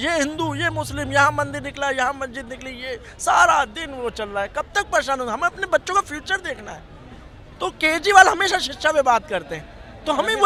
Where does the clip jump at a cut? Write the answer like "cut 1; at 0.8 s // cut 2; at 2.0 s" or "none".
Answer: none

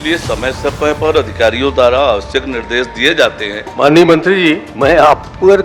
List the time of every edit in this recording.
cut 1; at 3.6 s // cut 2; at 4.7 s

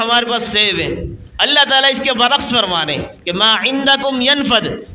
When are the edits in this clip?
cut 1; at 1.2 s

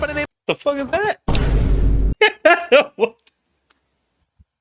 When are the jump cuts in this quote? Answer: none

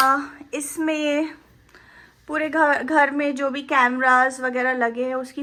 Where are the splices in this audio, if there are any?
none

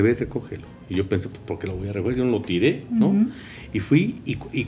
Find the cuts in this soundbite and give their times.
none

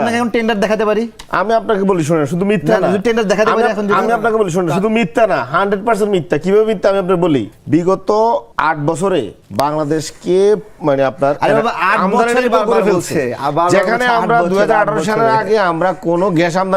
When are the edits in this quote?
cut 1; at 7.6 s // cut 2; at 8.5 s // cut 3; at 9.4 s

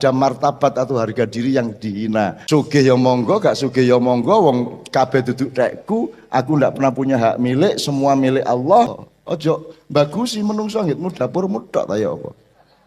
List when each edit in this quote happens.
cut 1; at 2.4 s // cut 2; at 9.0 s

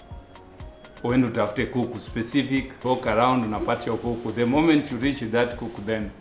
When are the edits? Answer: cut 1; at 2.7 s

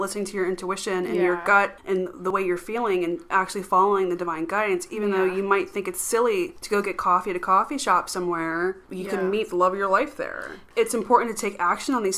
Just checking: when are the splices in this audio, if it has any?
cut 1; at 2.1 s // cut 2; at 6.6 s // cut 3; at 8.9 s // cut 4; at 10.6 s

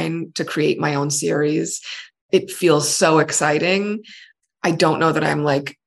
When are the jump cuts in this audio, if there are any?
cut 1; at 2.2 s // cut 2; at 4.2 s

